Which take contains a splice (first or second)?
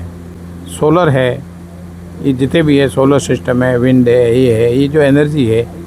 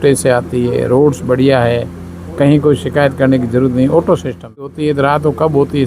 second